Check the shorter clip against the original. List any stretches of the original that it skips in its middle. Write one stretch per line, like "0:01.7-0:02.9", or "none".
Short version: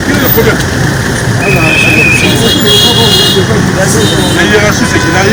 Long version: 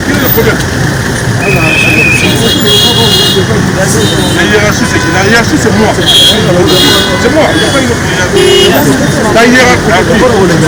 none